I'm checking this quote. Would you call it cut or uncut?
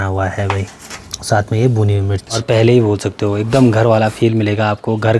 cut